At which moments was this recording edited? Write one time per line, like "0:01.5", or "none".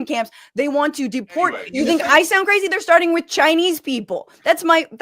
0:01.6